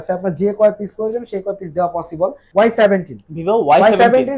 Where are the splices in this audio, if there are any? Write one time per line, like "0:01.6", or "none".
0:02.4

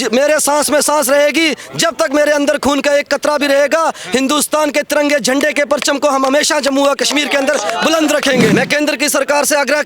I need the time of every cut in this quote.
0:08.5

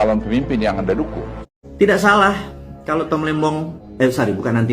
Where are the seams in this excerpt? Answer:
0:01.3
0:03.8

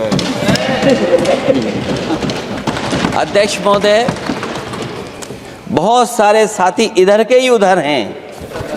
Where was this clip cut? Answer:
0:02.7

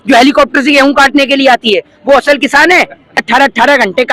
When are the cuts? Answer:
0:03.2

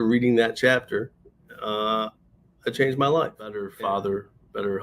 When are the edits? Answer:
0:03.7

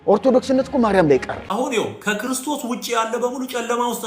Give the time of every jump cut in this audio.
0:01.5

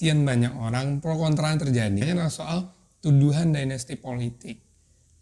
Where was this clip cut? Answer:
0:02.0

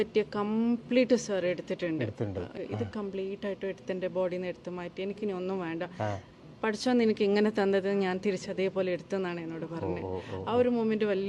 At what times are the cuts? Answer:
0:02.5

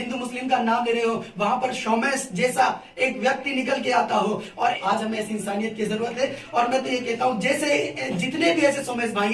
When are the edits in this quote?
0:04.8

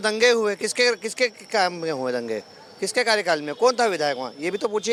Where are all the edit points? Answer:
none

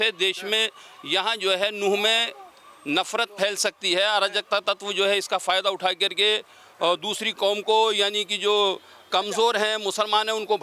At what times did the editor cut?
none

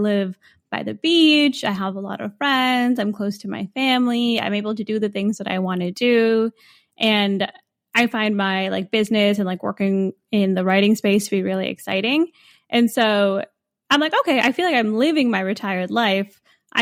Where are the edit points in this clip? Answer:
none

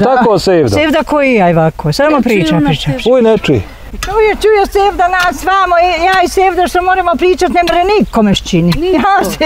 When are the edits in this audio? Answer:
0:03.9

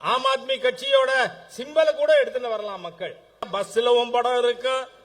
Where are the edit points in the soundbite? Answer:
0:03.5

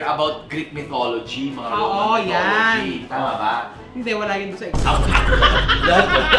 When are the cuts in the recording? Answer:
none

